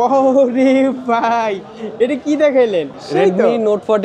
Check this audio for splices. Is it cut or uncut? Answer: cut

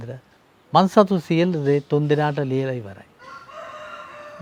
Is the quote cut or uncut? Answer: uncut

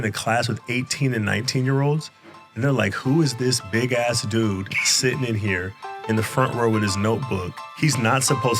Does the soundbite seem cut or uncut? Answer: cut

